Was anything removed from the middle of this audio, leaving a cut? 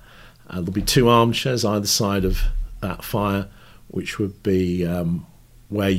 no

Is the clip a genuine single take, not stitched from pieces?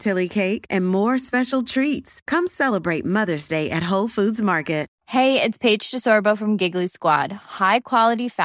no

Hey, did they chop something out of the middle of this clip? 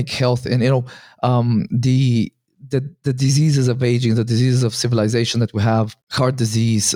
yes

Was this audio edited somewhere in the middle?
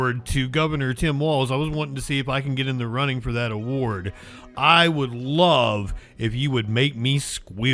no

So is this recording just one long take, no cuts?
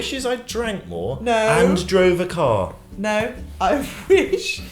yes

